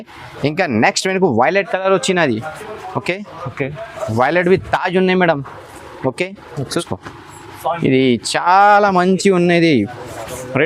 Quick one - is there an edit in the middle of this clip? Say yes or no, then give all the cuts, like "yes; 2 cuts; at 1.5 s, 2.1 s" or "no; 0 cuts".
yes; 1 cut; at 6.7 s